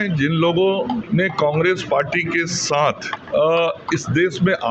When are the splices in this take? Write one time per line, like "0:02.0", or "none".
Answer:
0:01.0
0:03.1